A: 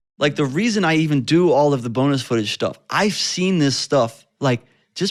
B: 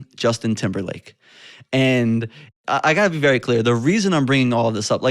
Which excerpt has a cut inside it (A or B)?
B